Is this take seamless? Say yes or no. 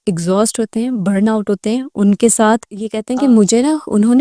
no